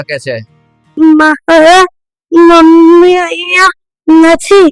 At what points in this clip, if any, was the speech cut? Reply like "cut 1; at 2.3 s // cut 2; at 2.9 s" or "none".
cut 1; at 0.9 s

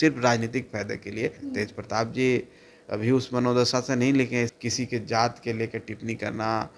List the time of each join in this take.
cut 1; at 1.4 s // cut 2; at 4.5 s

